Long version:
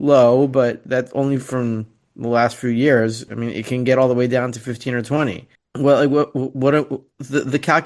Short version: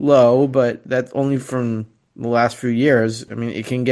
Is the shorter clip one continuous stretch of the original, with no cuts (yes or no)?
yes